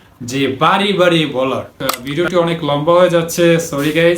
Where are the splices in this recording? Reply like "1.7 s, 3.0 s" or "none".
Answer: 2.0 s